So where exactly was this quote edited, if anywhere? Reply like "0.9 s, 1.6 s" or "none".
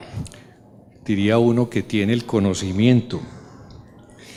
none

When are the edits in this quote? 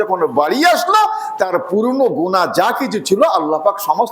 none

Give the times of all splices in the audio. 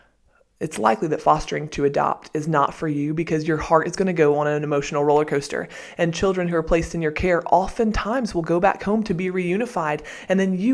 none

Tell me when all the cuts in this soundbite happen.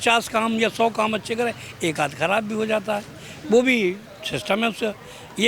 none

